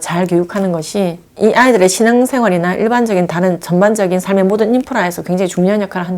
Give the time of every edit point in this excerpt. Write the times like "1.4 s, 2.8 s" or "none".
1.2 s

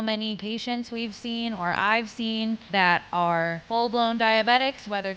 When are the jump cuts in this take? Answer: 2.6 s, 3.6 s

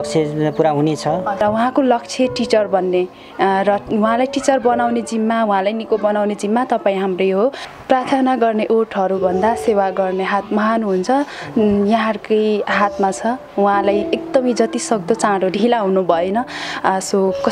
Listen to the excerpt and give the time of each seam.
1.4 s, 7.7 s

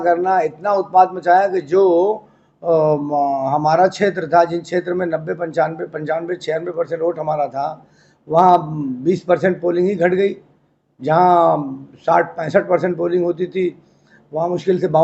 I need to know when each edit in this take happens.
none

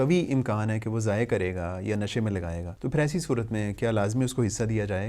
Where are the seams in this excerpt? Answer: 2.7 s

